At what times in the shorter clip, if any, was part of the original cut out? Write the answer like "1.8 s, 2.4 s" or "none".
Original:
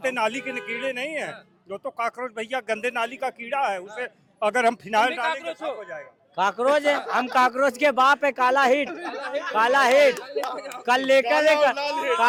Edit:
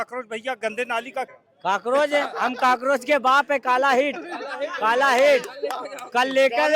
1.4 s